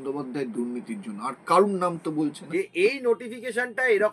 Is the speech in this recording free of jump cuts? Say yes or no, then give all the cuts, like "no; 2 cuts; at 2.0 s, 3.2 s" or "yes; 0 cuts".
no; 1 cut; at 2.4 s